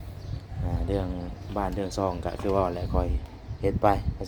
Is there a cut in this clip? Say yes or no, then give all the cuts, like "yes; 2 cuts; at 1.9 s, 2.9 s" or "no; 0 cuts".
no; 0 cuts